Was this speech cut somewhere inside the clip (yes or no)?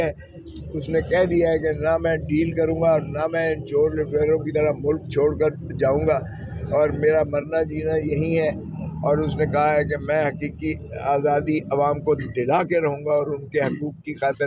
no